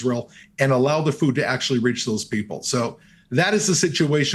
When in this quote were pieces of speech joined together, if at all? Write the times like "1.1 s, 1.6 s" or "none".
none